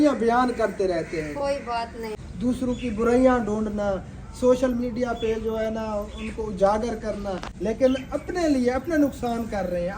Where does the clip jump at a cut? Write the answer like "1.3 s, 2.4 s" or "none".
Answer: 2.2 s, 7.5 s